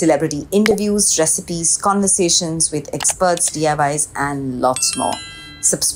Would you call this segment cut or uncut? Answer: uncut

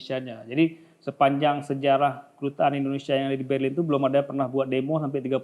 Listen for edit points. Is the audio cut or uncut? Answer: uncut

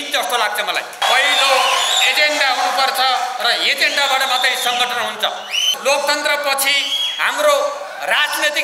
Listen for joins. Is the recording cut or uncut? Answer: cut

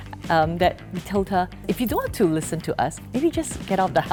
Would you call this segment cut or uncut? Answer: uncut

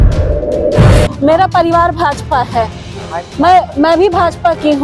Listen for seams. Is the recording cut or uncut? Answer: cut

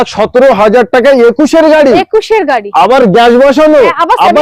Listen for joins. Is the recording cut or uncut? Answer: uncut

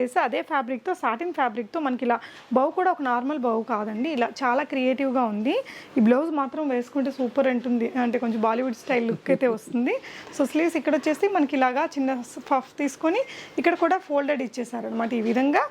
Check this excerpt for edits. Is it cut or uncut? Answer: uncut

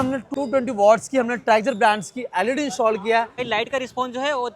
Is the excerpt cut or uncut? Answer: cut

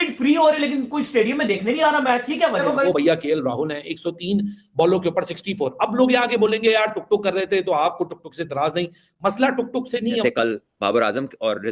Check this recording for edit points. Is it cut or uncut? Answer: cut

